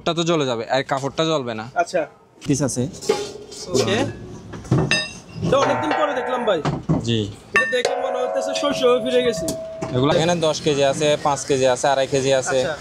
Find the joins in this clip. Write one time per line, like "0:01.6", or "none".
0:02.5
0:10.1